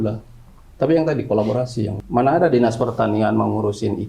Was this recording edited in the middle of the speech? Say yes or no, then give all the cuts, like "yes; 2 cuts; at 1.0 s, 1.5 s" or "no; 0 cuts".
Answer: yes; 1 cut; at 2.0 s